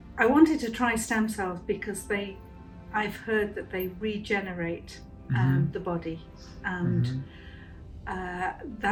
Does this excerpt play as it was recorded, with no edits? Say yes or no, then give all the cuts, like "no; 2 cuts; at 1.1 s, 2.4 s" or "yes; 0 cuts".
yes; 0 cuts